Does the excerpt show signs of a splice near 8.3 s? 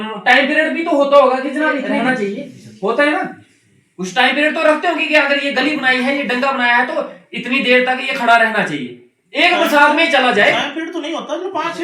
no; 1 cut; at 1.9 s

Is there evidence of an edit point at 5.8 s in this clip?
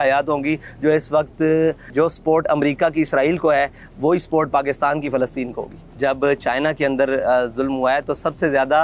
yes; 2 cuts; at 1.8 s, 5.8 s

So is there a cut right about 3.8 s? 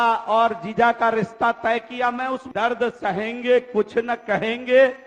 no; 1 cut; at 2.5 s

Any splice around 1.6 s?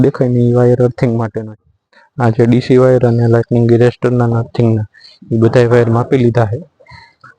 yes; 1 cut; at 1.6 s

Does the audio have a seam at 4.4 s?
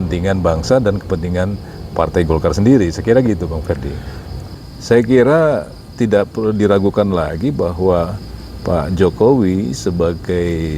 yes; 1 cut; at 4.4 s

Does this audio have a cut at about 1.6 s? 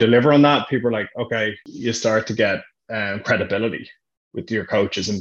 yes; 1 cut; at 1.6 s

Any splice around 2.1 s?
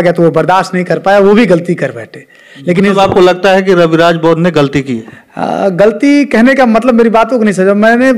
no; 0 cuts

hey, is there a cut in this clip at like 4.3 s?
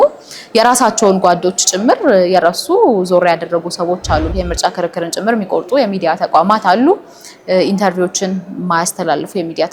yes; 1 cut; at 4.3 s

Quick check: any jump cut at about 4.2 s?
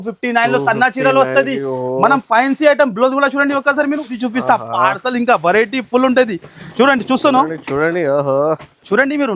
yes; 1 cut; at 4.2 s

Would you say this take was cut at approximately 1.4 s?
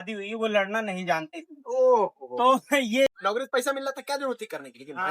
no; 1 cut; at 3.1 s

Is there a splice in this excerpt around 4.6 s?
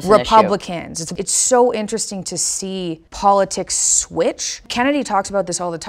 yes; 3 cuts; at 1.1 s, 3.1 s, 4.6 s

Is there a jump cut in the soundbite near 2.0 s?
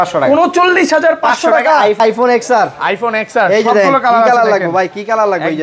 yes; 1 cut; at 2.0 s

